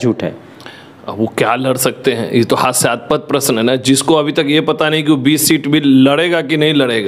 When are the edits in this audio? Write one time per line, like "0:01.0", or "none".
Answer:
none